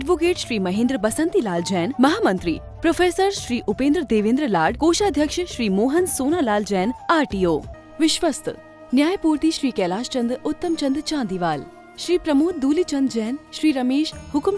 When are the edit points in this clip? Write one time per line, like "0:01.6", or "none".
0:07.7